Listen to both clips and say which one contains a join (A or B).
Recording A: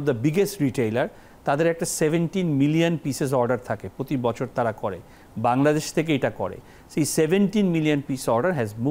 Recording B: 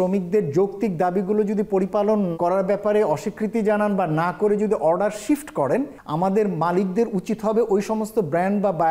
B